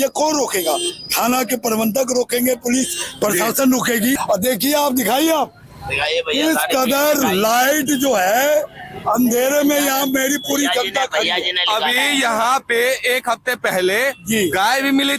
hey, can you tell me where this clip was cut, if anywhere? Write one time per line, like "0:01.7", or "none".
0:04.2